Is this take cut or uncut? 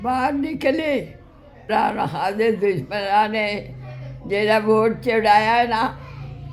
cut